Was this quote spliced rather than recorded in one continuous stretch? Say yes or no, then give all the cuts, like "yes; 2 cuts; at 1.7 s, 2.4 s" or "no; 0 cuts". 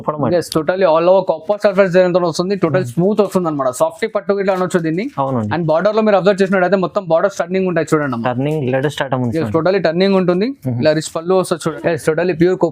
yes; 1 cut; at 11.7 s